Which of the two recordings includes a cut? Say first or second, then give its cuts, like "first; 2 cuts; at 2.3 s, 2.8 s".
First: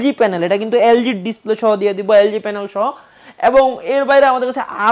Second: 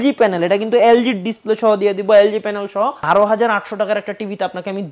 second; 1 cut; at 3.0 s